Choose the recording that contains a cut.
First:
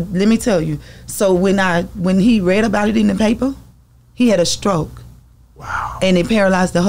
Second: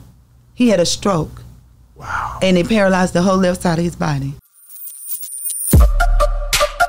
second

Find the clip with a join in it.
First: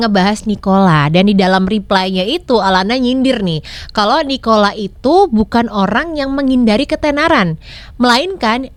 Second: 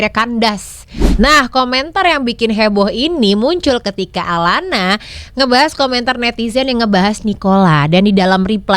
second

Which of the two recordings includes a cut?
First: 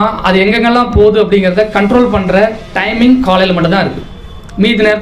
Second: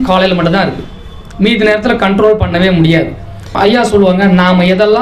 second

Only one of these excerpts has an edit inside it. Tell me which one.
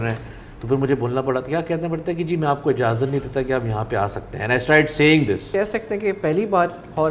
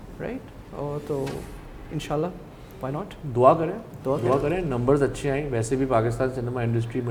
first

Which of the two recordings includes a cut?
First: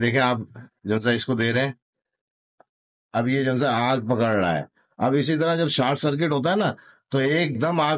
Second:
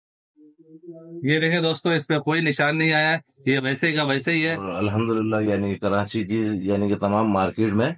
second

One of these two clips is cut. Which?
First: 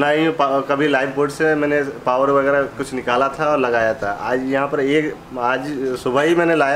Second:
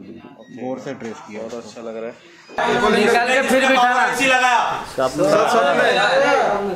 second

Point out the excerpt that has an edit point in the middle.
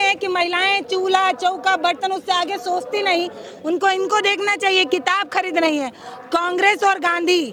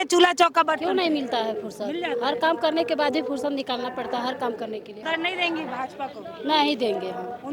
second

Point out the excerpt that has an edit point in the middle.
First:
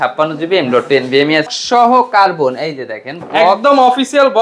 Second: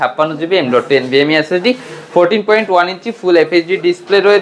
first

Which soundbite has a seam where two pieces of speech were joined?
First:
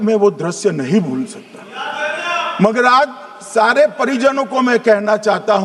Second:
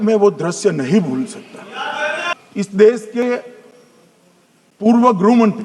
second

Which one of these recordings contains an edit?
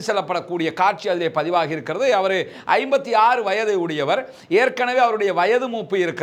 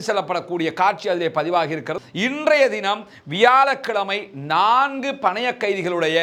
second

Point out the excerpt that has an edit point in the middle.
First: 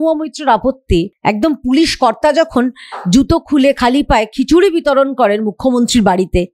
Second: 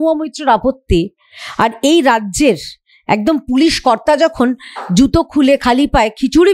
first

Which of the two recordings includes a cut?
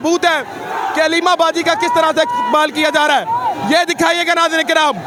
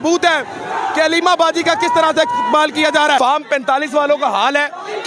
second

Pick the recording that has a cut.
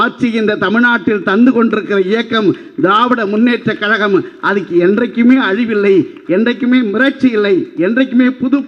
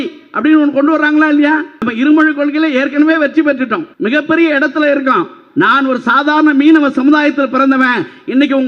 second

